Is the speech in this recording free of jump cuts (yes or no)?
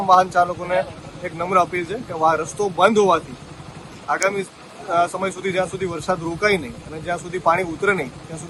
yes